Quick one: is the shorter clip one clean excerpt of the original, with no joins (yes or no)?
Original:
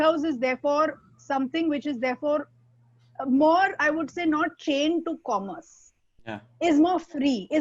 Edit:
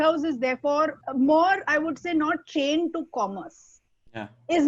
no